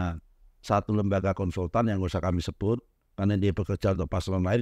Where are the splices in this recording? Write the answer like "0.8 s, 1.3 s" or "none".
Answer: none